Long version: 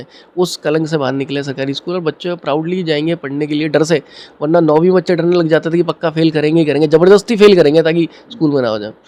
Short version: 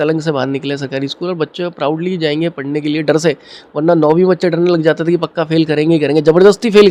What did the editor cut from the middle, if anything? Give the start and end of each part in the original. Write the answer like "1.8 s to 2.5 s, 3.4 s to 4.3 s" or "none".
none